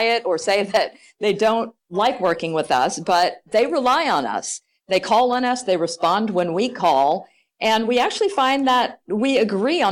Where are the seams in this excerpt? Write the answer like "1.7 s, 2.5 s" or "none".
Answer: none